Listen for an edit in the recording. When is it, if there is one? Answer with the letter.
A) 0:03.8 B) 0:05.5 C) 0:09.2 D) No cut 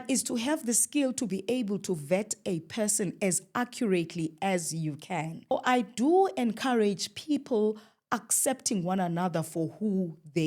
B